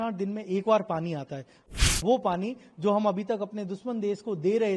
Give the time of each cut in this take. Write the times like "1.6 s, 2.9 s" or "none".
1.9 s